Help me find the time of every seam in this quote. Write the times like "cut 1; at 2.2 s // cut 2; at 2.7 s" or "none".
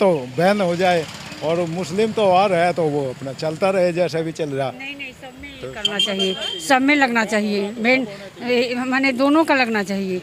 none